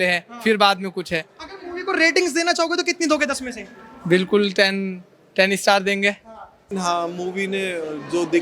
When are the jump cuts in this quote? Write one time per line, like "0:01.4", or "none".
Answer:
0:06.7